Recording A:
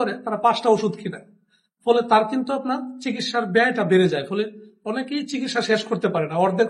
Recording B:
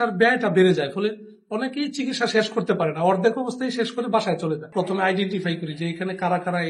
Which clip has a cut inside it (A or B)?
B